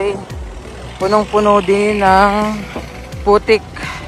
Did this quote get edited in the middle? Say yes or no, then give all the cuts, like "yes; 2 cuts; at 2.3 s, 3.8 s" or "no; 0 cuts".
no; 0 cuts